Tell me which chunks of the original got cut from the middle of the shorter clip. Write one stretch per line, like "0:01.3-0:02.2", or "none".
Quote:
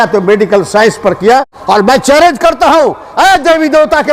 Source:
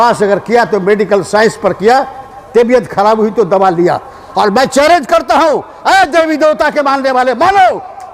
0:02.1-0:04.2